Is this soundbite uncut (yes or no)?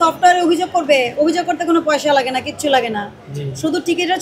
yes